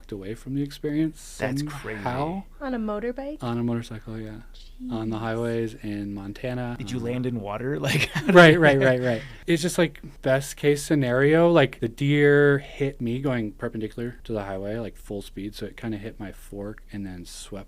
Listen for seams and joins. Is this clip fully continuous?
no; 6 cuts; at 6.8 s, 9.3 s, 10.1 s, 11.8 s, 13.0 s, 14.2 s

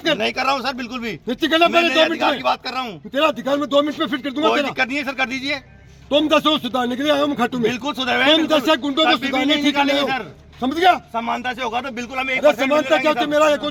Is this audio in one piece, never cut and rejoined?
yes; 0 cuts

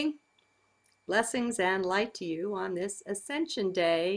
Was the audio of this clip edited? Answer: yes; 1 cut; at 0.9 s

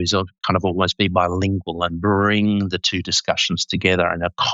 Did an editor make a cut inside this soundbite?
no; 0 cuts

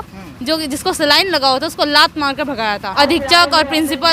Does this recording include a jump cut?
yes; 1 cut; at 2.9 s

